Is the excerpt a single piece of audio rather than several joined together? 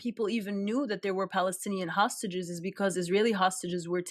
yes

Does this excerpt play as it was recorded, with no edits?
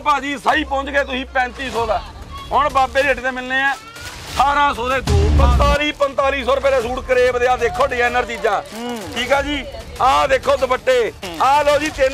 no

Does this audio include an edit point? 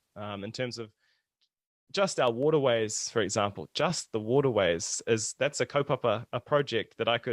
no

